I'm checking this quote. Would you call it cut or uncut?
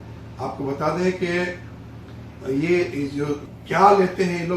cut